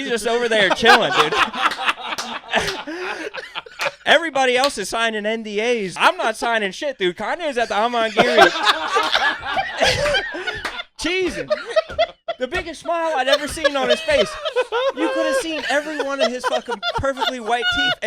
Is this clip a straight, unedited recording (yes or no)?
no